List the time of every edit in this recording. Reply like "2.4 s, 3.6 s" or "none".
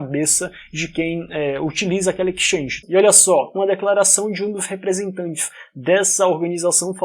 2.8 s